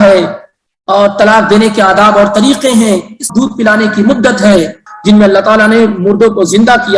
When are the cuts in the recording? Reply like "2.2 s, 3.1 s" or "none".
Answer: 3.2 s, 4.9 s

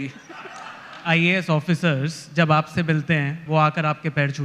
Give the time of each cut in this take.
1.0 s, 3.4 s

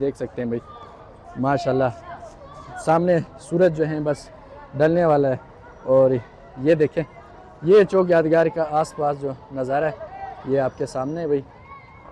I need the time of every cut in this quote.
none

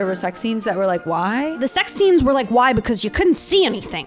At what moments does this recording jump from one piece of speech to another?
1.6 s

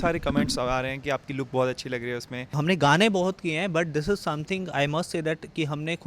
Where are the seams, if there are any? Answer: 2.5 s

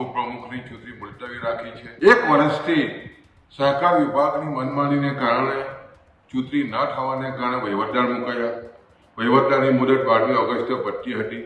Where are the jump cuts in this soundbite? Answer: 1.8 s

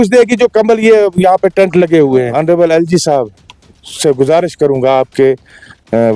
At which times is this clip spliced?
2.3 s

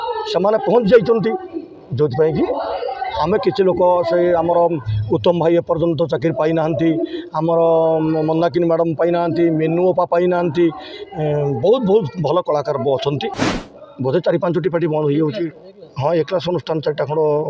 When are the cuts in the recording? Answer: 13.3 s

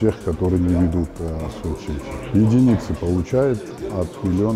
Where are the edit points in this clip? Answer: 2.2 s

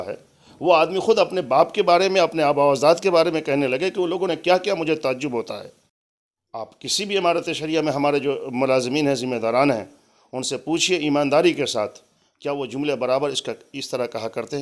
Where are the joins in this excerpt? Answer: none

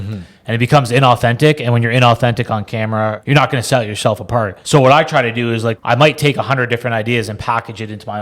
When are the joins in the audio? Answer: 3.2 s, 4.6 s, 5.8 s

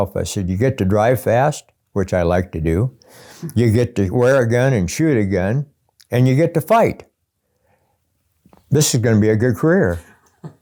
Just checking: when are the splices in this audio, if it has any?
none

